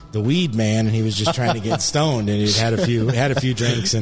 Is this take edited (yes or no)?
no